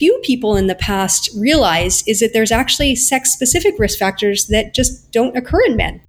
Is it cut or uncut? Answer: uncut